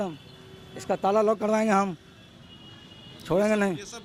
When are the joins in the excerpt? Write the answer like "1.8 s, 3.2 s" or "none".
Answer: none

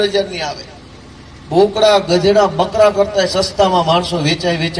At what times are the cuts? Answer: none

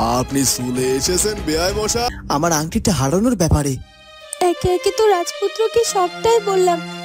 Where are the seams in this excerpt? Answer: 2.1 s

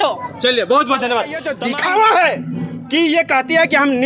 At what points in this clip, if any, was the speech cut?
1.6 s

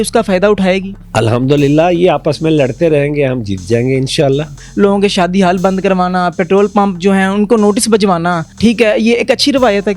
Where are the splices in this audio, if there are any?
1.0 s, 4.6 s, 8.5 s

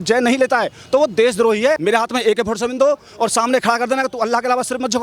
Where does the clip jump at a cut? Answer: 1.8 s

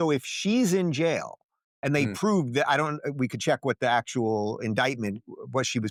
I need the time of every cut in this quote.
none

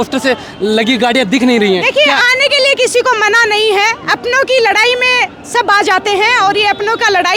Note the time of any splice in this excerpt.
none

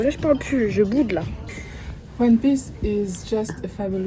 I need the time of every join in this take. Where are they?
1.3 s

